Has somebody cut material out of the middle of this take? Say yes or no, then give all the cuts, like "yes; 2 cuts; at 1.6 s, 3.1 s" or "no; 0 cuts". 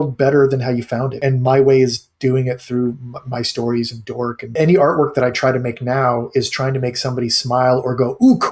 yes; 2 cuts; at 1.1 s, 4.5 s